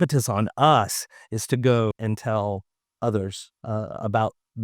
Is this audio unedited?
no; 1 cut; at 1.9 s

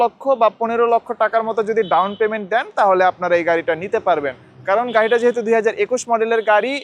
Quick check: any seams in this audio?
no; 0 cuts

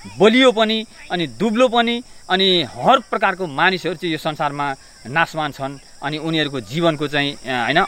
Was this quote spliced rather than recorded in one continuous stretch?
no; 0 cuts

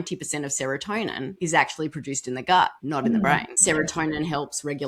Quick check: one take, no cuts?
no; 3 cuts; at 1.3 s, 2.8 s, 3.5 s

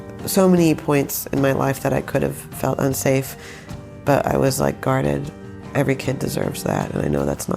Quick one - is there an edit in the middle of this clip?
yes; 1 cut; at 5.6 s

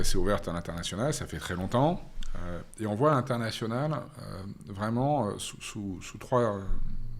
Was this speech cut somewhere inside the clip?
no; 0 cuts

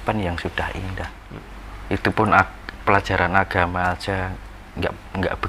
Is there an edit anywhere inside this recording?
yes; 1 cut; at 1.2 s

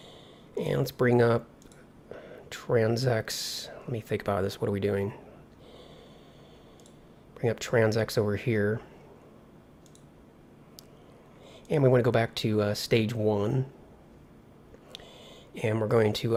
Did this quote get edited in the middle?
no; 0 cuts

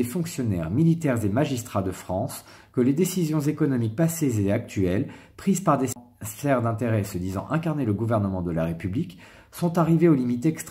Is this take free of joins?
no; 1 cut; at 5.9 s

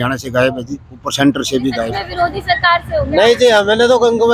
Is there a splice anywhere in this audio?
yes; 1 cut; at 2.0 s

